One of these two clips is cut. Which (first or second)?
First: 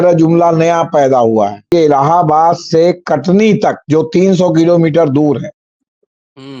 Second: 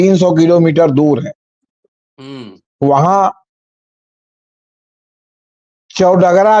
first